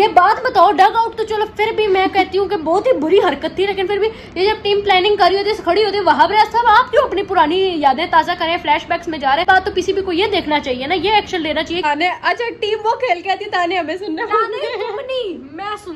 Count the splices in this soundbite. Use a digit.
2